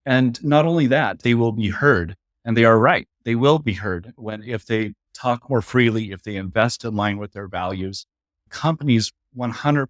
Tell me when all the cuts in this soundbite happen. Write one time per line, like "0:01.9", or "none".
0:01.2
0:05.1
0:08.5